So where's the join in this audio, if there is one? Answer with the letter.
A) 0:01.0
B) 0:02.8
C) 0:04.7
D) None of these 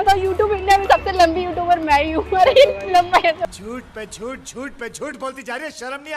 D